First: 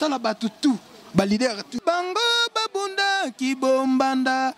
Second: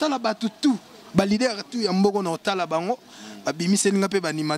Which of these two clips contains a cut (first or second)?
first